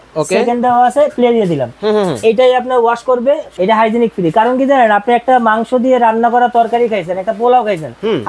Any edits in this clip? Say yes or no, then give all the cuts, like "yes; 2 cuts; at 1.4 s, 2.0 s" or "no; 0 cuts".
yes; 1 cut; at 3.5 s